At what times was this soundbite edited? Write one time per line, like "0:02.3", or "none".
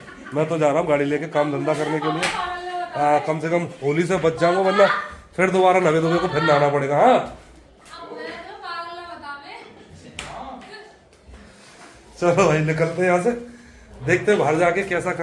none